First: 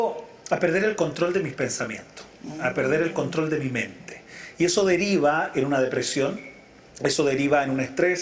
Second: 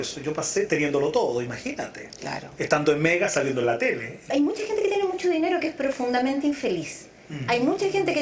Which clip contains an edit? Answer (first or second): second